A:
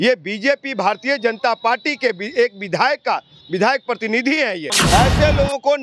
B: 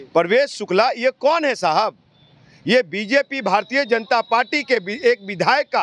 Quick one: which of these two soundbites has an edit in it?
A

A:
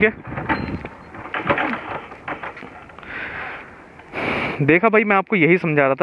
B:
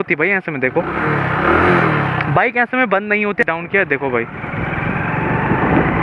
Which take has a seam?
B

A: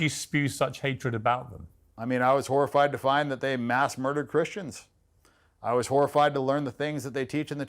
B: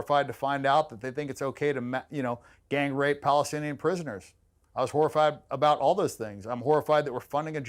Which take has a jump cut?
A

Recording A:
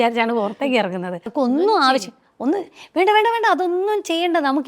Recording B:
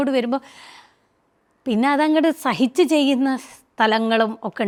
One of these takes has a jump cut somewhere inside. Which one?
A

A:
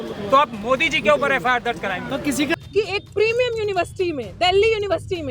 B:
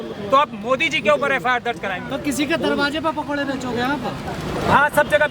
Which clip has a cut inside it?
A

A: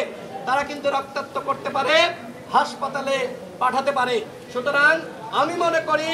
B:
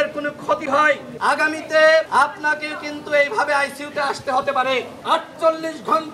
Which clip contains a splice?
B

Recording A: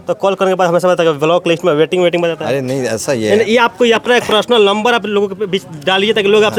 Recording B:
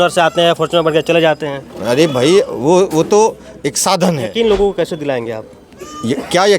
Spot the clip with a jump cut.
B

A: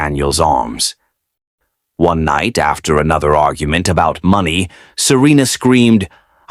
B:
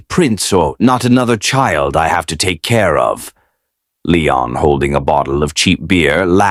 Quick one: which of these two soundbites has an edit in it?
A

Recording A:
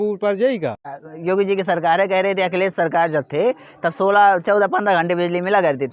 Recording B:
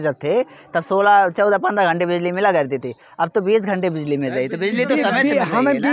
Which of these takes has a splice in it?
A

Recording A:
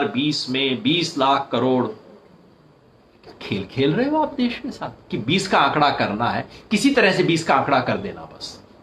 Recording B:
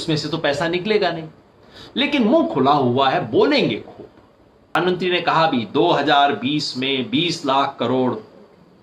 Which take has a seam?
B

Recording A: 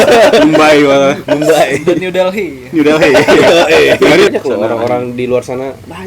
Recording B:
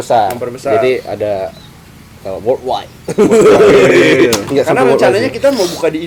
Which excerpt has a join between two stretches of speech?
A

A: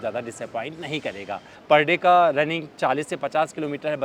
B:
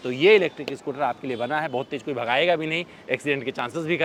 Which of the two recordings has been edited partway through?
A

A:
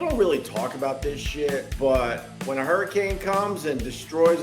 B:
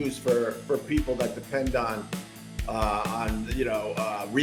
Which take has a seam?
A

